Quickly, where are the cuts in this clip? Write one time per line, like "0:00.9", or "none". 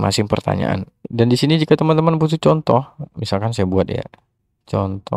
0:01.0